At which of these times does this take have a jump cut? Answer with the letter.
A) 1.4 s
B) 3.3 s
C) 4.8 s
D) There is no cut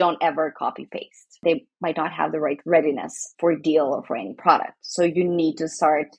A